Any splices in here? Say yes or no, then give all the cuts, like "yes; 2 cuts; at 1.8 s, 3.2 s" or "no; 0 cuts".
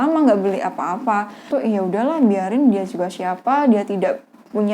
yes; 1 cut; at 1.5 s